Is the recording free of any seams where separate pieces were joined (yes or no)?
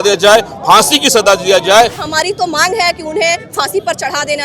no